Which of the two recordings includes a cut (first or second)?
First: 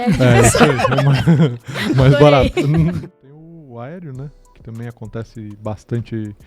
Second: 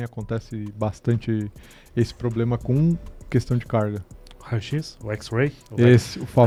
first